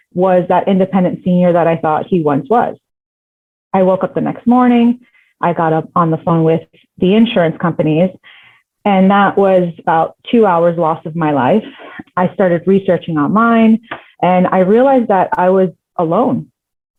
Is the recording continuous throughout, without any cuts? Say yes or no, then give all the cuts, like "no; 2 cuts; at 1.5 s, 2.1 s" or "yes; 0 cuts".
yes; 0 cuts